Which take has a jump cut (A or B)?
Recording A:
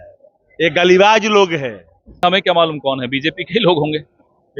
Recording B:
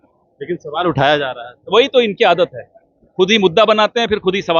A